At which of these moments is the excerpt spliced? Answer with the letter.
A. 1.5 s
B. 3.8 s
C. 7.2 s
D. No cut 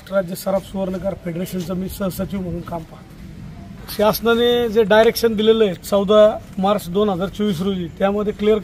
B